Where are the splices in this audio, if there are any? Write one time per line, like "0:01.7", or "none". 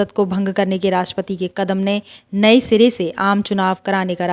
none